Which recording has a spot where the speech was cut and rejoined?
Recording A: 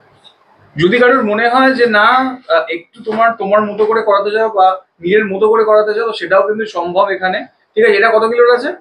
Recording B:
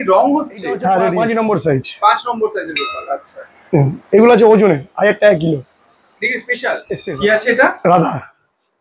B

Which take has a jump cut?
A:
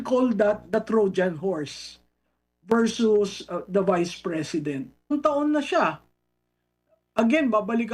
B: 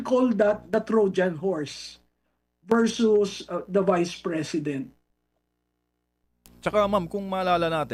A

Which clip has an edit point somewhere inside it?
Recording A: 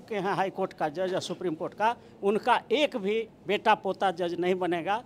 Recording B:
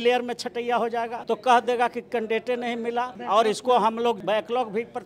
B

